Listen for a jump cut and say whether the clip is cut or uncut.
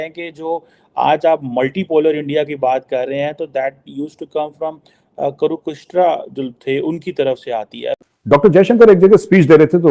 cut